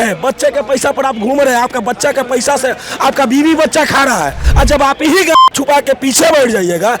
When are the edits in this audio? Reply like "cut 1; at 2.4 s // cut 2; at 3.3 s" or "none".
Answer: cut 1; at 4.4 s